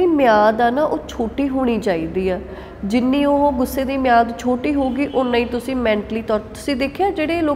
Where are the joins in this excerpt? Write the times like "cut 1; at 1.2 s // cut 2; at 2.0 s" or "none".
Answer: none